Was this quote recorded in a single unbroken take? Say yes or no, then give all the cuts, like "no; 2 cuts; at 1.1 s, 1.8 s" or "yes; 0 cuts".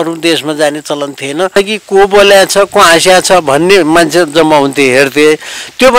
no; 1 cut; at 1.5 s